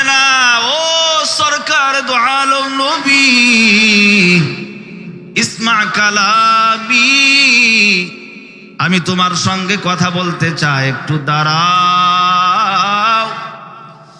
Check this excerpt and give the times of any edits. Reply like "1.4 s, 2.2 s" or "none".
none